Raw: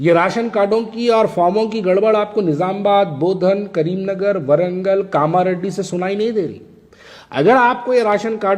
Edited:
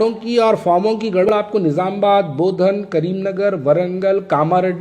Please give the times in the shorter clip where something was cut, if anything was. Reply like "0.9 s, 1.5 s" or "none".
1.3 s